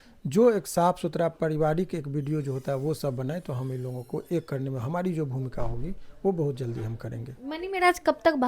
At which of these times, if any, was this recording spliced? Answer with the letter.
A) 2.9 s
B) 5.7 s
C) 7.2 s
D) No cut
C